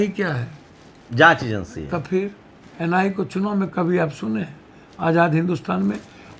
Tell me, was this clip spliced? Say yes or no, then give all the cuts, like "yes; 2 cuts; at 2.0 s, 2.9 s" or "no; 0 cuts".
no; 0 cuts